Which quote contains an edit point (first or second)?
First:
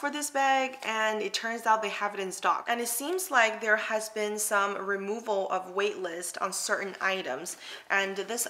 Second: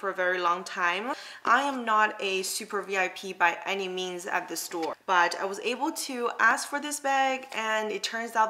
second